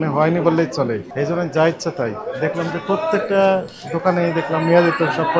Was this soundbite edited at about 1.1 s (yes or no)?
yes